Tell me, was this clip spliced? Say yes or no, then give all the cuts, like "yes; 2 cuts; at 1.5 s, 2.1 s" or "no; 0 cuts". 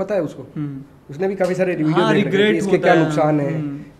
no; 0 cuts